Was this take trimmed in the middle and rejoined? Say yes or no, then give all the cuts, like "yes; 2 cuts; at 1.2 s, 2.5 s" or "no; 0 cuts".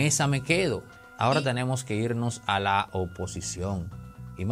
yes; 1 cut; at 0.9 s